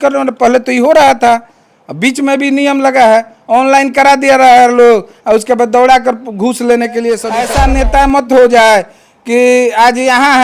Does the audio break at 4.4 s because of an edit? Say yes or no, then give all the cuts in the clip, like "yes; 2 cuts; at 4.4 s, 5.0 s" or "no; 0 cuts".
no; 1 cut; at 7.4 s